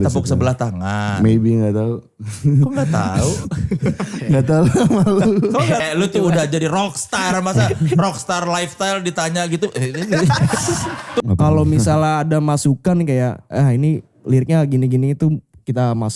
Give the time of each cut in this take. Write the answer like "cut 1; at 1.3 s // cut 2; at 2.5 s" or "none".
cut 1; at 5.8 s // cut 2; at 11.2 s